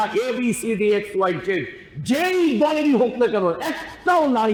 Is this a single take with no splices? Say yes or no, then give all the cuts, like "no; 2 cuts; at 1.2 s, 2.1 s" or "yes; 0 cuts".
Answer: yes; 0 cuts